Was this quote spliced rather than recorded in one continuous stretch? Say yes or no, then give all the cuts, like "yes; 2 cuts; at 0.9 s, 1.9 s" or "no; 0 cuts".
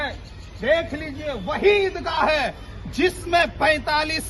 no; 0 cuts